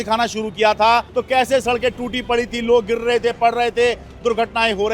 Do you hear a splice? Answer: yes; 1 cut; at 1.1 s

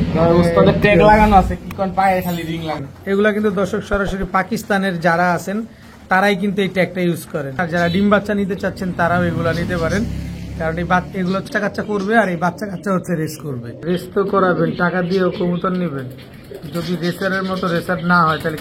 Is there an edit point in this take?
yes; 4 cuts; at 2.9 s, 7.6 s, 11.5 s, 13.7 s

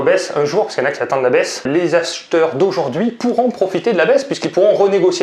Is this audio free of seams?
yes; 0 cuts

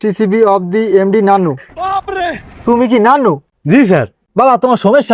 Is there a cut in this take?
yes; 1 cut; at 3.8 s

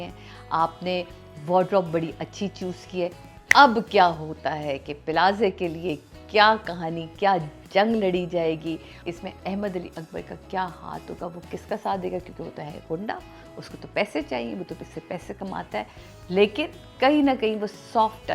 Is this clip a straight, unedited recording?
no; 2 cuts; at 3.3 s, 9.0 s

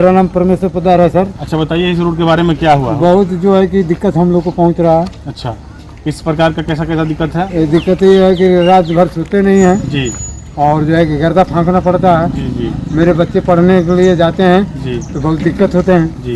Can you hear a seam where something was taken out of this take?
no; 0 cuts

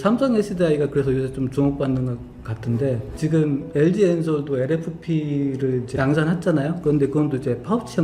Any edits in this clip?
yes; 1 cut; at 3.1 s

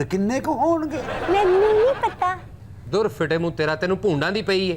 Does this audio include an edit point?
no; 0 cuts

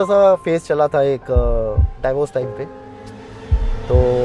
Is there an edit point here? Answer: no; 0 cuts

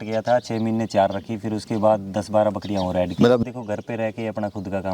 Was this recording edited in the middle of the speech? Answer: yes; 1 cut; at 3.4 s

